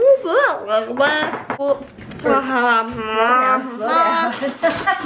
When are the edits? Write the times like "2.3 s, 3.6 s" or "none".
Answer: 1.5 s

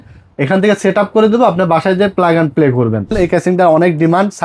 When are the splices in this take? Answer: 3.1 s

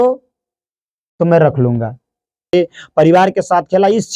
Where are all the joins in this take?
2.5 s

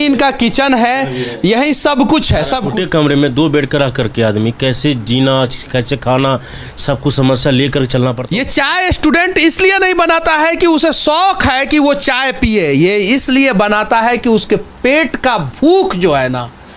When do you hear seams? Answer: 2.7 s, 8.2 s

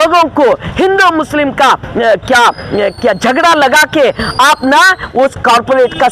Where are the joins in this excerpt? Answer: none

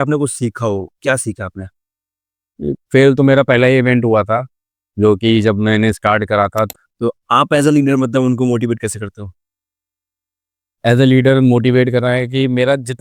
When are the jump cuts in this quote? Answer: 6.7 s

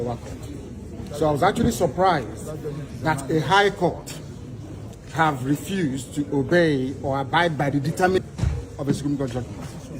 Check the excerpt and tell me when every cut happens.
8.2 s

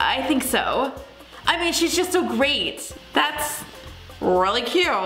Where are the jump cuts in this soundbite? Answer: 2.9 s

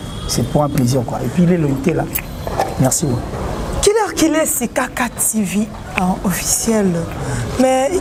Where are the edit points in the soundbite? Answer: none

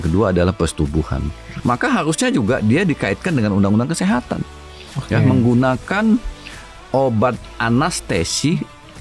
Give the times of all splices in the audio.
1.5 s

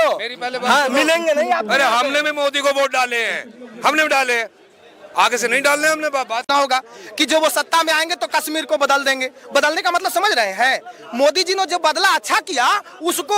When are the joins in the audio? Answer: 6.4 s

